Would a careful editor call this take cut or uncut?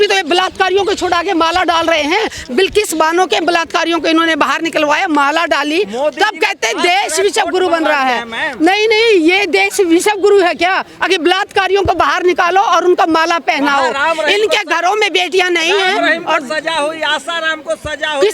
uncut